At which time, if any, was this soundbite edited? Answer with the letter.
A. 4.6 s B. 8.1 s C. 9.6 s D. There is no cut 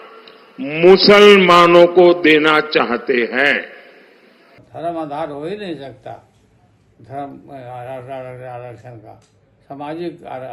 A